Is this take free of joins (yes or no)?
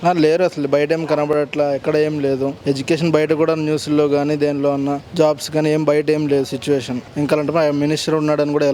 yes